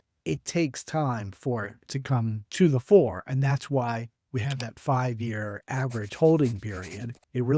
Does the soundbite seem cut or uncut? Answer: cut